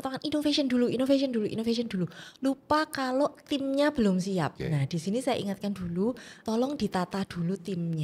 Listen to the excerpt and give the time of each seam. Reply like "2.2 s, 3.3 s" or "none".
4.6 s, 6.4 s